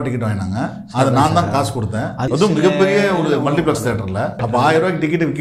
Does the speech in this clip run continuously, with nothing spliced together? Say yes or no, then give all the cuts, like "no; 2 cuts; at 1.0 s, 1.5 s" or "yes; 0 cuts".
no; 2 cuts; at 2.3 s, 4.3 s